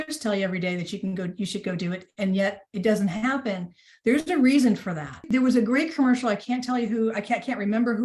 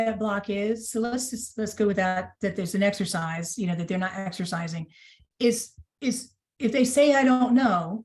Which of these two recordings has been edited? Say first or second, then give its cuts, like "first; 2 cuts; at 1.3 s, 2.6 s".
first; 1 cut; at 5.3 s